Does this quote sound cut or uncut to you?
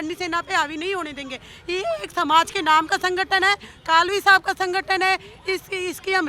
uncut